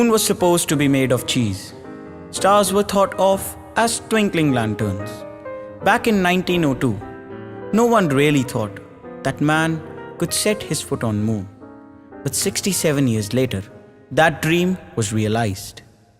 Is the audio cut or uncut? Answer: cut